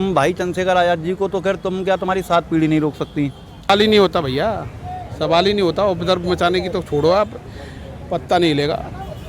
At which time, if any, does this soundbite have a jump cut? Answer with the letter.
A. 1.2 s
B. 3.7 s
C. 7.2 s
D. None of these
B